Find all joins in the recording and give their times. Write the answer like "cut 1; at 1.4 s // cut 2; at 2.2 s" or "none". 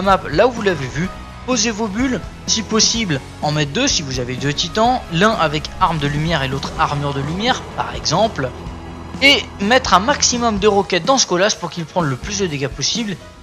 cut 1; at 2.0 s